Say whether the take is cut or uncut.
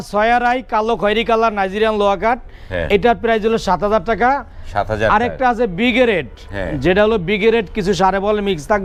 uncut